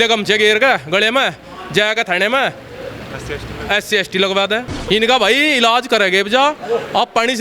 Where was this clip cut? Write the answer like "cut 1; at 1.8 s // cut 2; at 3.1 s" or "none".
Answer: cut 1; at 4.7 s